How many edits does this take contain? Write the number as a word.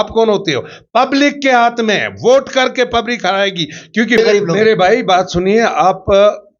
one